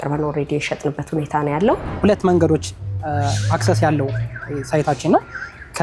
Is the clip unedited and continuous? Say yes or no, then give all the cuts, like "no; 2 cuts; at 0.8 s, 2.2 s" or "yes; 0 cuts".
no; 1 cut; at 1.9 s